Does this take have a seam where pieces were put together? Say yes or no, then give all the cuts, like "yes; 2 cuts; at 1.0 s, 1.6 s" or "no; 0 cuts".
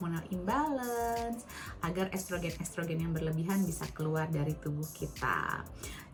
no; 0 cuts